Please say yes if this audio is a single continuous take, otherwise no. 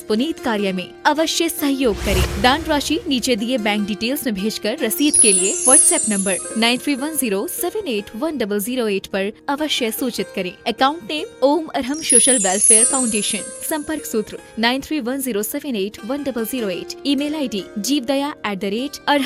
yes